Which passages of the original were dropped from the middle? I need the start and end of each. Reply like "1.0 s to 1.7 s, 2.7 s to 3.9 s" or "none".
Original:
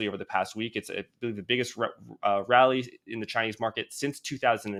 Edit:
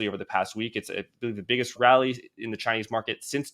1.8 s to 2.4 s